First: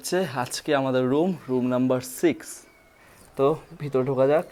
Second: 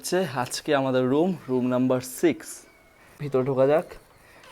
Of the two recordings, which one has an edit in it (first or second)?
second